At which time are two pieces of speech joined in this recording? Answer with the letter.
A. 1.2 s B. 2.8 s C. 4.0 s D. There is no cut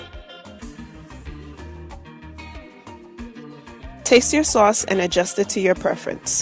C